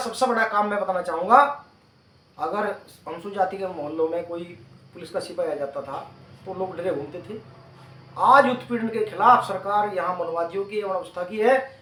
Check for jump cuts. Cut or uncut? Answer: uncut